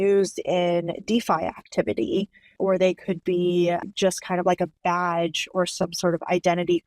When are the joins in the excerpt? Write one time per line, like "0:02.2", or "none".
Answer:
0:02.5